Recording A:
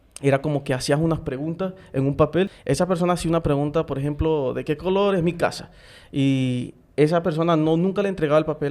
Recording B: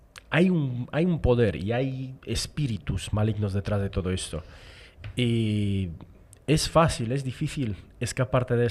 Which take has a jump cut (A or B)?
A